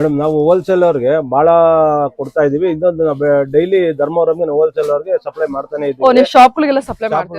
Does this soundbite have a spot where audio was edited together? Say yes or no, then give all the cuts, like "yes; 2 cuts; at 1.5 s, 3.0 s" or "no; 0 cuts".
no; 0 cuts